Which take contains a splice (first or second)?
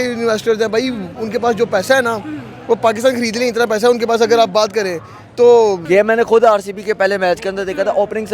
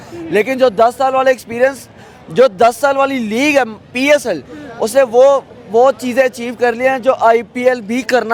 first